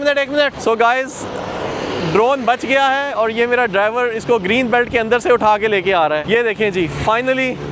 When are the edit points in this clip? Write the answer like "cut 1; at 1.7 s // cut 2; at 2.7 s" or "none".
none